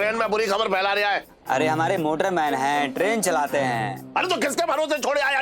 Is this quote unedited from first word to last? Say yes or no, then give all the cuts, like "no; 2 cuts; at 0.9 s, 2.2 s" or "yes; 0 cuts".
no; 1 cut; at 1.3 s